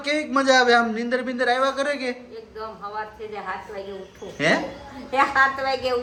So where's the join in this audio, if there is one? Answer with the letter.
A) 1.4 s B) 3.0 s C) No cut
C